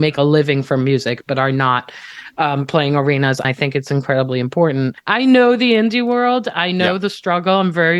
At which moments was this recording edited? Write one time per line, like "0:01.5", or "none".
0:03.4
0:05.0